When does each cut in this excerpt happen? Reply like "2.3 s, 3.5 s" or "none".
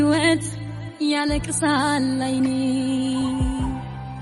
none